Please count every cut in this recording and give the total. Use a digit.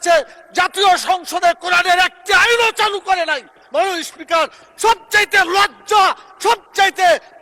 0